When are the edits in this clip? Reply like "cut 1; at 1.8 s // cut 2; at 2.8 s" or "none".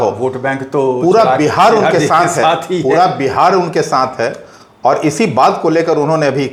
none